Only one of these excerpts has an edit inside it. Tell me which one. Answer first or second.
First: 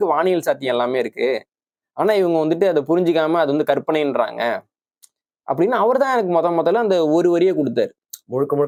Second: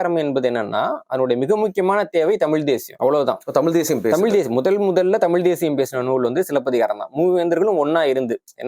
second